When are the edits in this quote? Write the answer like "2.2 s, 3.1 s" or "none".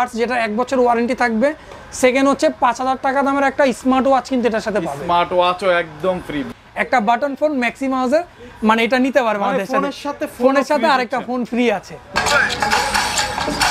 6.5 s, 12.1 s